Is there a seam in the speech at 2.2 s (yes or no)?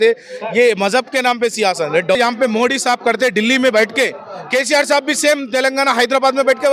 yes